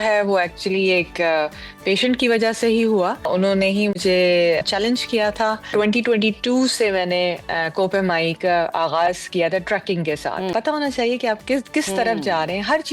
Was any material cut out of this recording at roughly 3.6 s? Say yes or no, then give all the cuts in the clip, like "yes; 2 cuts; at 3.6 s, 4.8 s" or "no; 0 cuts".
yes; 4 cuts; at 3.6 s, 4.6 s, 5.7 s, 10.5 s